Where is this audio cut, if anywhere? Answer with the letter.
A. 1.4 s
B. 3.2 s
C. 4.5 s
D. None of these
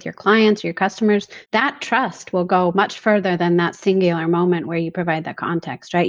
A